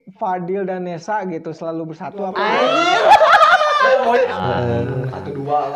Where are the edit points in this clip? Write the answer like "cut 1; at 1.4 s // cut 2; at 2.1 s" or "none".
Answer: cut 1; at 4.3 s